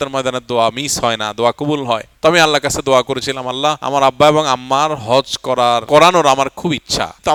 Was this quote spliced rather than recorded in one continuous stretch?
no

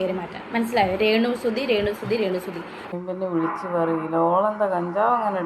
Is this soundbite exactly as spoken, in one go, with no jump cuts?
no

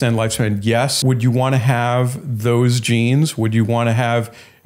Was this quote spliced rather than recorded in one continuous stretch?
yes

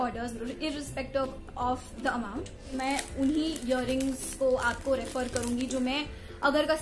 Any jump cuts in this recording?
yes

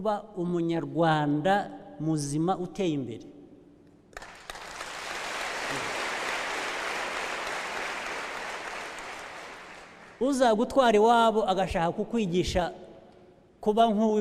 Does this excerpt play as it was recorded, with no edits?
yes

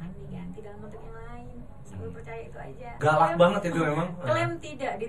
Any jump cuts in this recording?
yes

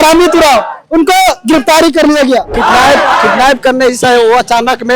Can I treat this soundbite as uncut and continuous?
no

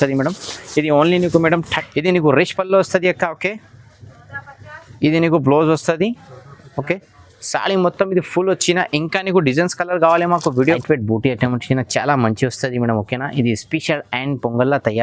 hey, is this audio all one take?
no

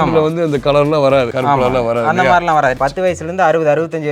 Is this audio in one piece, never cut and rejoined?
no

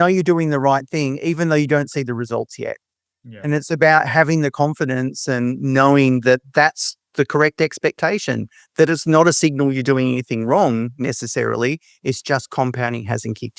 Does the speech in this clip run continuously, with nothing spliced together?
yes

